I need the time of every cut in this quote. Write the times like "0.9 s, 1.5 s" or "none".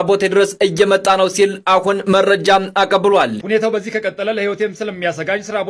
3.4 s